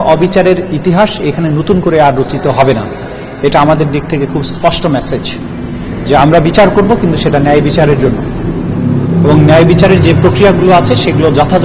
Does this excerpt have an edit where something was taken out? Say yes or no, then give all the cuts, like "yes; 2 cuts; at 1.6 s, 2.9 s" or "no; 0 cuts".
no; 0 cuts